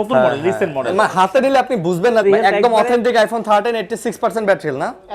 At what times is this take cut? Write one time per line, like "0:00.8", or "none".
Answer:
0:02.2